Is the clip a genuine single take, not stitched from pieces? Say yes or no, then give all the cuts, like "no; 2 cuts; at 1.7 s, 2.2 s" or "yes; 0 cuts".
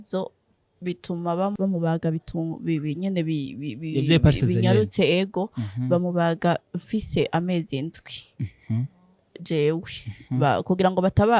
no; 1 cut; at 1.6 s